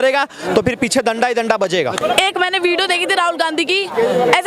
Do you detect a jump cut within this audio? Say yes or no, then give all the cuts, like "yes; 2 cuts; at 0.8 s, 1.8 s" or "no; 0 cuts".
yes; 1 cut; at 2.0 s